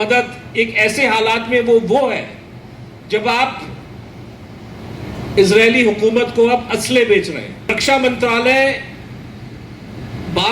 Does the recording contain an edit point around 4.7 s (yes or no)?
no